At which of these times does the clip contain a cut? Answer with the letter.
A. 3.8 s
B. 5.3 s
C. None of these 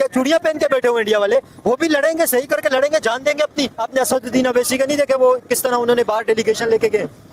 A